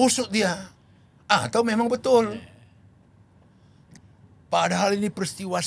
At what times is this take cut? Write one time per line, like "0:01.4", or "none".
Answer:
0:03.8